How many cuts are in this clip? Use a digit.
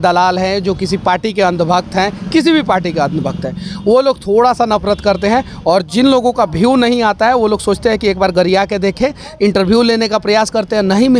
0